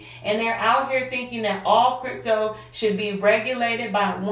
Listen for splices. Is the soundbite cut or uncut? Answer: uncut